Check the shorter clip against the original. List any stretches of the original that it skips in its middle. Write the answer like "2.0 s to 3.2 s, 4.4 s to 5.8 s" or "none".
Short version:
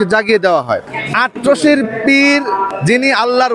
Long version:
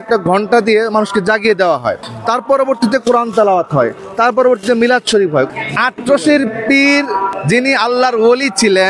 2.1 s to 5.6 s